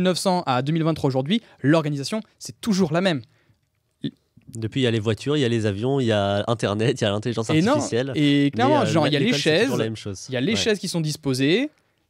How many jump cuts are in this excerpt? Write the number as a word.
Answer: zero